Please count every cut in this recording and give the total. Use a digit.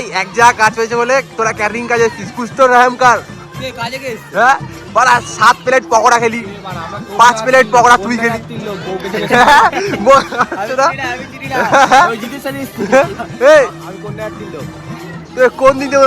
2